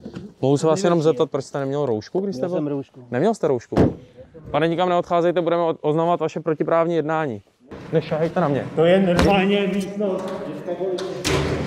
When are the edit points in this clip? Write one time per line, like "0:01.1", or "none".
0:07.8